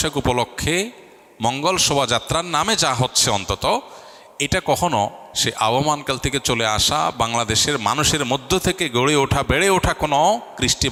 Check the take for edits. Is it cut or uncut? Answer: uncut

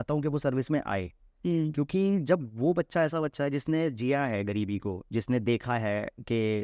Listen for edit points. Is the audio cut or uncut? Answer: uncut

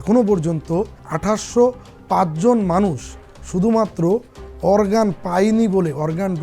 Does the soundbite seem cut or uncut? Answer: cut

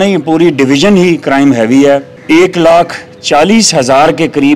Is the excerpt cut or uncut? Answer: cut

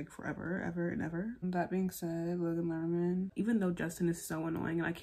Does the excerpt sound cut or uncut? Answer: cut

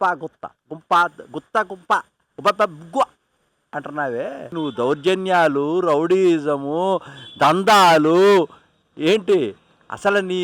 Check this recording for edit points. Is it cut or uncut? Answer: cut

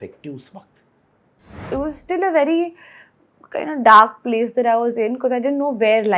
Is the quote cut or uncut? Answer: cut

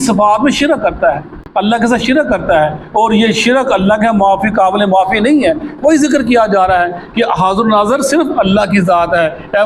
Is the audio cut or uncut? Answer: uncut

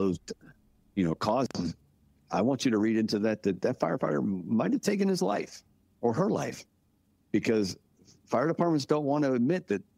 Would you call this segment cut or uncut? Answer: uncut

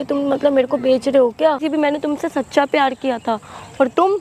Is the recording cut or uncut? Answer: cut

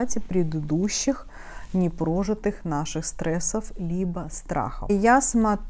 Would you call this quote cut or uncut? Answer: cut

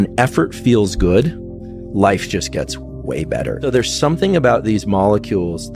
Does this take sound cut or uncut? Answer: cut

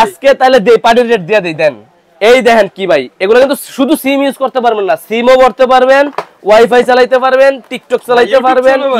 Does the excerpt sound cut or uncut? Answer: uncut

